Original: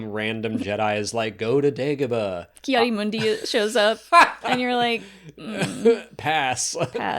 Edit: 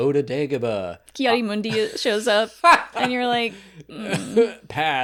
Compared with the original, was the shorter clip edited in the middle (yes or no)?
no